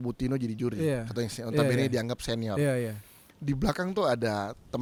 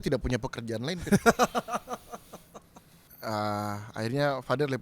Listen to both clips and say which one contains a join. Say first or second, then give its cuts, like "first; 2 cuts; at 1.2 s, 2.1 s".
second; 1 cut; at 3.0 s